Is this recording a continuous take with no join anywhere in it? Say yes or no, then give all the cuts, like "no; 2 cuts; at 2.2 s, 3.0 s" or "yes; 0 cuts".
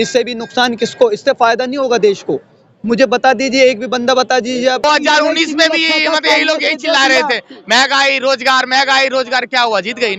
no; 1 cut; at 4.8 s